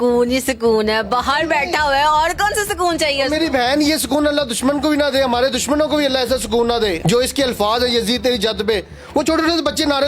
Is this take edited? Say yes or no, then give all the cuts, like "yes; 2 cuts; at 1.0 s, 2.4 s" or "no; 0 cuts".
yes; 1 cut; at 7.0 s